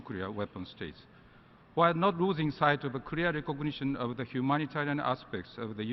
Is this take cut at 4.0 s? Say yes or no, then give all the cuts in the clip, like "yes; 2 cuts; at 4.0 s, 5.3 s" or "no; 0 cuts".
yes; 1 cut; at 4.0 s